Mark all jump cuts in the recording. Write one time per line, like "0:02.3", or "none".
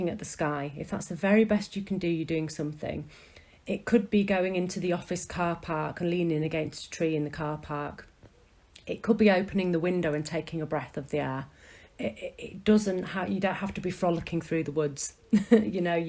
none